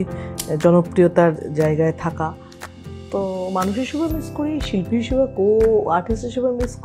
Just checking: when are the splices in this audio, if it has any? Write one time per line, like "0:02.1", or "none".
none